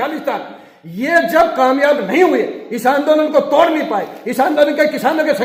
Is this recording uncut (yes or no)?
yes